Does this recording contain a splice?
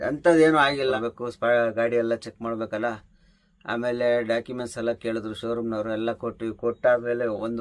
yes; 1 cut; at 0.9 s

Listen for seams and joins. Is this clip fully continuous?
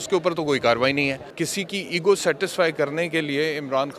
no; 1 cut; at 1.2 s

